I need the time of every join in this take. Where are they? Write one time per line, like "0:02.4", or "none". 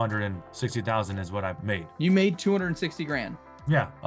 0:01.6